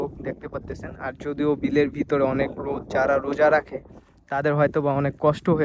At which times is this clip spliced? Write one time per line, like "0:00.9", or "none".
none